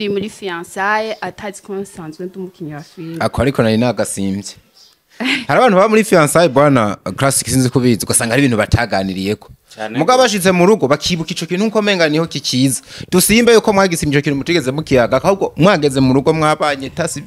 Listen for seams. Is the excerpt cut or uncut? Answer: uncut